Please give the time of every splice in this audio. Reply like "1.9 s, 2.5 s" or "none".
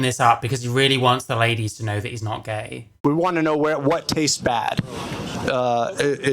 3.0 s